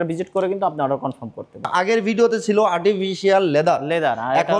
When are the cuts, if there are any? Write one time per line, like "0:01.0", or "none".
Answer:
0:01.6